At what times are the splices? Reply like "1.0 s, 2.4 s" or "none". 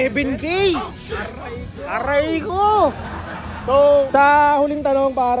none